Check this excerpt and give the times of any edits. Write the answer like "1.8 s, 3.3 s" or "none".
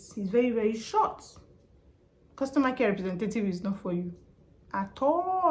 none